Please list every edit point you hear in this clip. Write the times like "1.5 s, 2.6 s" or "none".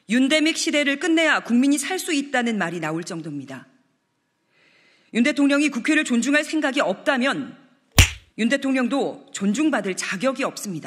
none